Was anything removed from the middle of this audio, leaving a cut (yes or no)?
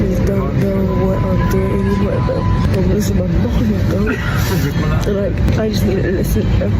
yes